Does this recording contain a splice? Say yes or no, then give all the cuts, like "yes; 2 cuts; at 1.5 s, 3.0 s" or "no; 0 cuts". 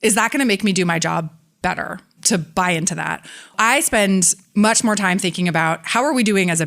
yes; 1 cut; at 3.5 s